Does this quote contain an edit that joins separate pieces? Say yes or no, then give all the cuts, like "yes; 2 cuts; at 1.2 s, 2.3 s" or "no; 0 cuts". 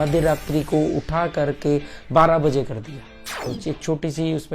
yes; 1 cut; at 3.4 s